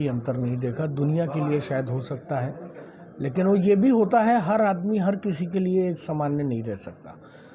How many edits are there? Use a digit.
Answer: 0